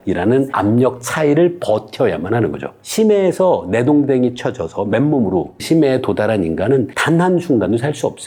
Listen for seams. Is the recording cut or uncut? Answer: uncut